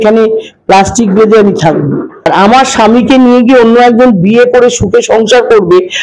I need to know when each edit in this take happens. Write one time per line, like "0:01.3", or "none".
0:02.3